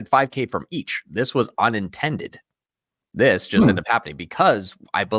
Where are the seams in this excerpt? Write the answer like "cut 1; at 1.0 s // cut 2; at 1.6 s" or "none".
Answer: none